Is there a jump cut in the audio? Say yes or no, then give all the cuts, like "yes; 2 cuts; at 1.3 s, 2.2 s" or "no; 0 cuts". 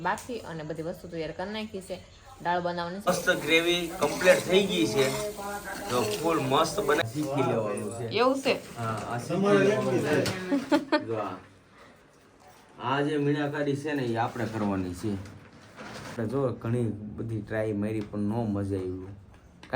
yes; 3 cuts; at 3.1 s, 7.0 s, 16.2 s